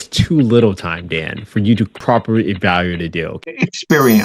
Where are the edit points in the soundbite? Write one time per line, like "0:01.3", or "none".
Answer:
0:02.0
0:03.3